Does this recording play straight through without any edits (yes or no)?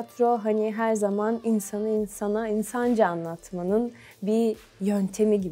yes